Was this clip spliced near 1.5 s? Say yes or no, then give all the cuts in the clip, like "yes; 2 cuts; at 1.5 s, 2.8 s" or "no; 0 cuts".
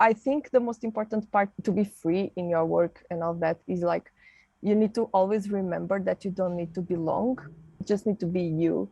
yes; 2 cuts; at 1.5 s, 7.8 s